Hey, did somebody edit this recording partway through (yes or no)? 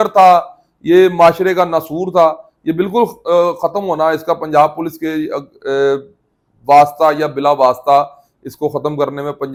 no